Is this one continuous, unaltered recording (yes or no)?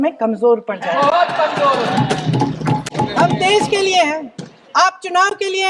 yes